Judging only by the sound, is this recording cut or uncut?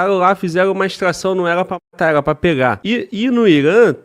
cut